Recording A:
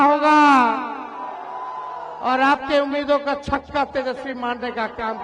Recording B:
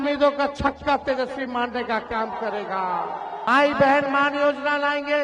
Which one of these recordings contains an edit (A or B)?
B